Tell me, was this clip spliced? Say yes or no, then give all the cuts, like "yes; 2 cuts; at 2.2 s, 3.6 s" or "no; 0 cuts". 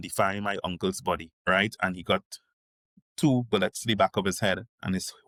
no; 0 cuts